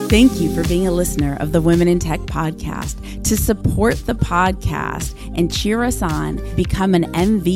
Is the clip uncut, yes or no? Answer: yes